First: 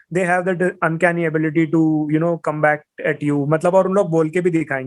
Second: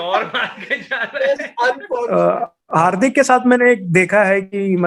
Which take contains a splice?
second; 1 cut; at 2.1 s

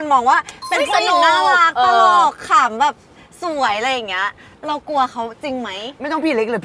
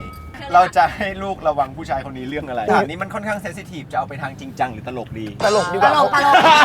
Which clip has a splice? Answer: second; 1 cut; at 2.7 s

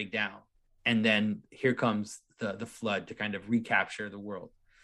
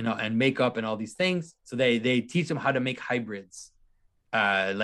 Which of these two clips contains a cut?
second; 1 cut; at 1.5 s

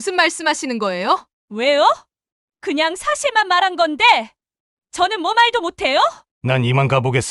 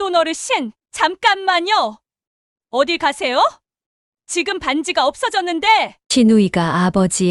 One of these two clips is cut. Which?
first; 2 cuts; at 1.3 s, 6.3 s

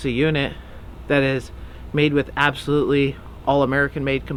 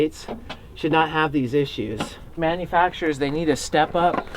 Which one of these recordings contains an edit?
second; 1 cut; at 2.3 s

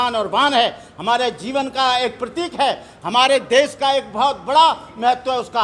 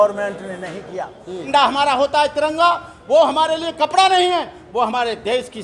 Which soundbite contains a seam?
second; 1 cut; at 1.5 s

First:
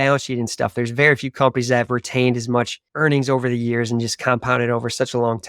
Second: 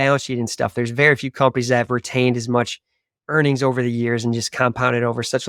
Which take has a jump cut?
first; 1 cut; at 2.8 s

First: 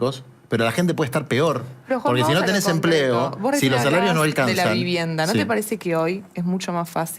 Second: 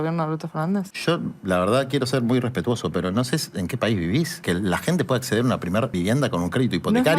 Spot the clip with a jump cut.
second; 3 cuts; at 0.9 s, 4.4 s, 5.9 s

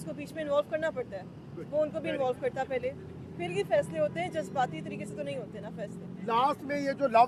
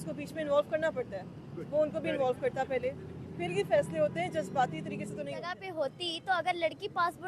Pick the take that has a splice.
second; 1 cut; at 5.6 s

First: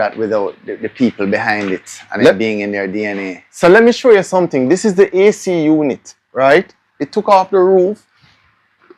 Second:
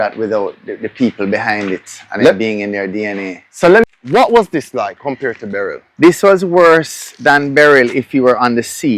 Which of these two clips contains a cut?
second; 1 cut; at 3.8 s

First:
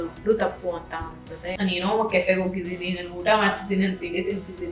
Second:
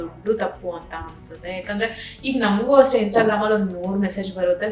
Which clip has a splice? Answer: first; 1 cut; at 1.5 s

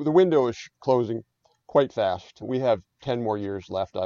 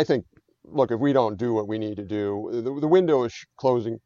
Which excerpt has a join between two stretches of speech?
first; 1 cut; at 2.5 s

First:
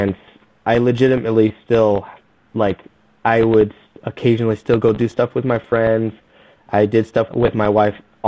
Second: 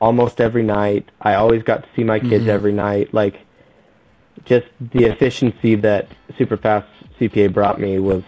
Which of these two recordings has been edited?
first; 1 cut; at 7.3 s

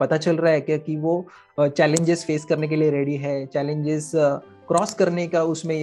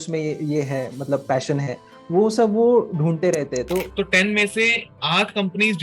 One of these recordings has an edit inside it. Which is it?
second; 1 cut; at 3.9 s

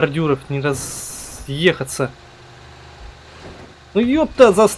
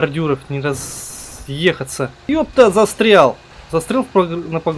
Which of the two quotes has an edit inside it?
second; 2 cuts; at 2.3 s, 3.5 s

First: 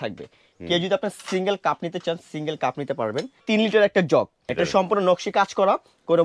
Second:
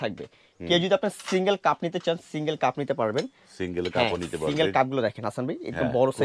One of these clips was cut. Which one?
first; 2 cuts; at 3.4 s, 4.4 s

